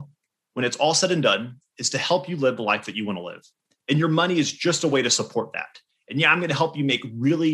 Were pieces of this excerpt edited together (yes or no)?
no